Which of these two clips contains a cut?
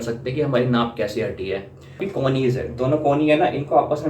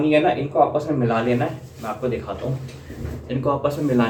first; 1 cut; at 2.0 s

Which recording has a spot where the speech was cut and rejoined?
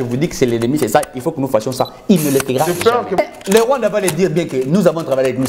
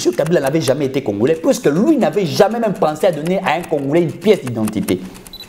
first; 1 cut; at 3.2 s

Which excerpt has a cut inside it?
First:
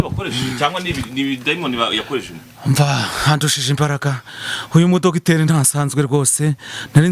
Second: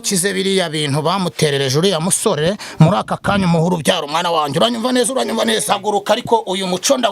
second; 1 cut; at 5.7 s

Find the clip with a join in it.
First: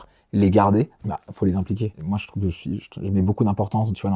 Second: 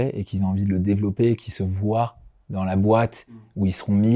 first; 2 cuts; at 1.0 s, 2.0 s

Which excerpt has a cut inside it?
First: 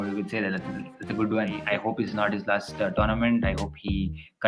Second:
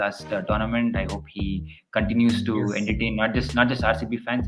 first; 1 cut; at 1.6 s

